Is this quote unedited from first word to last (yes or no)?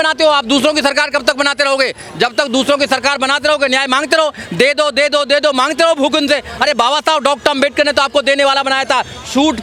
yes